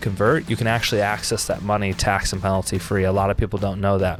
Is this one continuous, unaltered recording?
yes; 0 cuts

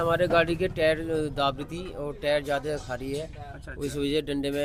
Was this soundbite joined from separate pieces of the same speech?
no; 0 cuts

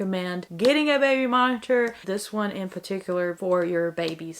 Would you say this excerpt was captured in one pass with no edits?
yes; 0 cuts

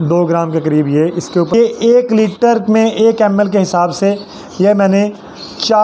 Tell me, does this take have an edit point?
yes; 1 cut; at 1.5 s

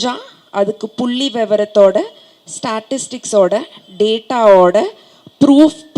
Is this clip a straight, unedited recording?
yes; 0 cuts

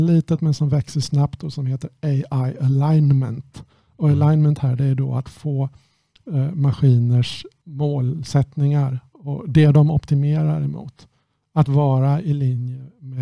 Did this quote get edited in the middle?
no; 0 cuts

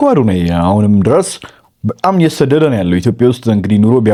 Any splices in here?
no; 0 cuts

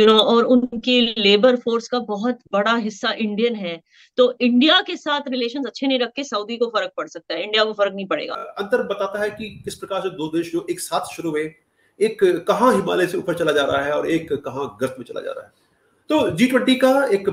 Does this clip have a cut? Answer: yes; 1 cut; at 8.4 s

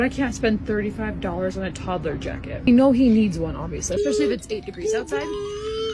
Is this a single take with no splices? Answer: no; 2 cuts; at 2.7 s, 3.7 s

